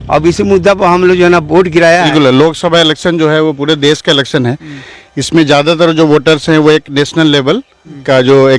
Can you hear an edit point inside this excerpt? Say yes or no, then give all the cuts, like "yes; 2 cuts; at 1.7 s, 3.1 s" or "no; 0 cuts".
yes; 1 cut; at 2.1 s